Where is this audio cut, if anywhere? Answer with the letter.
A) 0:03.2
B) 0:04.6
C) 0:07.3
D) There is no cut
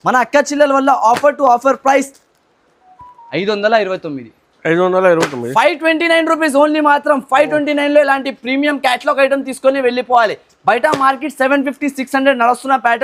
D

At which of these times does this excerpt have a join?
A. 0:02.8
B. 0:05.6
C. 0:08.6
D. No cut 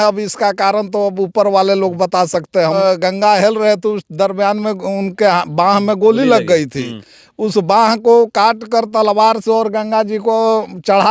A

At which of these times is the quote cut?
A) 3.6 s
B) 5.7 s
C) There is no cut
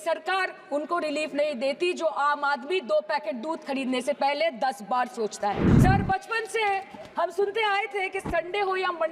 B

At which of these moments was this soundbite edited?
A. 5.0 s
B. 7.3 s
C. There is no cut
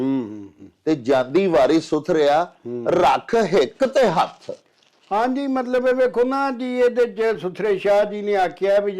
C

